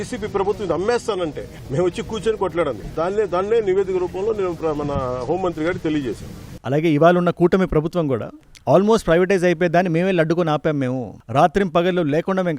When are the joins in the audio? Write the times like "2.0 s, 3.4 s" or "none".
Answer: 6.5 s